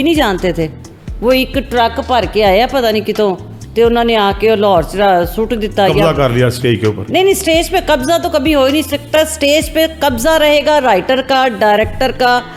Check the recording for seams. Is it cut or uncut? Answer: uncut